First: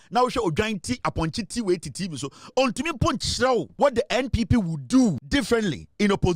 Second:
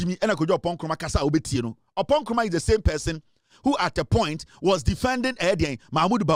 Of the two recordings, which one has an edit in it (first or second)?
first